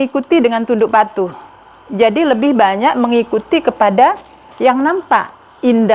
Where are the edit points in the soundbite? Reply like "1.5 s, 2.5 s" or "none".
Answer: none